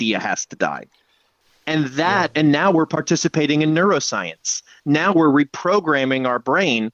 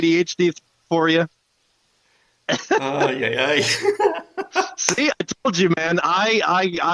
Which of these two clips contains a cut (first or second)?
first